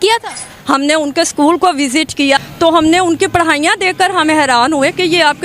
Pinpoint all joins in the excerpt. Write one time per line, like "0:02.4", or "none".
0:02.4